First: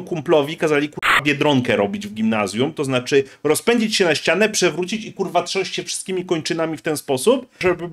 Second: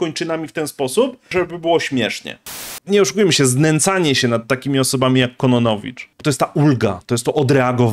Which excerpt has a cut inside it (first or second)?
second